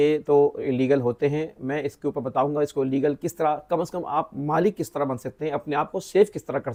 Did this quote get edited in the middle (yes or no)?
no